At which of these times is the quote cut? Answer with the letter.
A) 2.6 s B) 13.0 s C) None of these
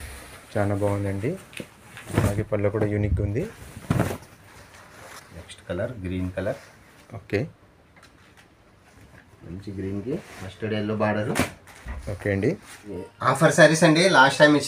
B